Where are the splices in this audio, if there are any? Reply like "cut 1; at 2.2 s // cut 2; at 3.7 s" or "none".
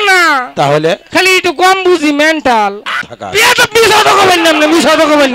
cut 1; at 3.1 s